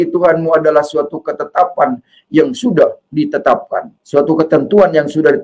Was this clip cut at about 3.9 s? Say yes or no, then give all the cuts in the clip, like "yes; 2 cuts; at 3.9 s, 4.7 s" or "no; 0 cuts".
yes; 1 cut; at 3.9 s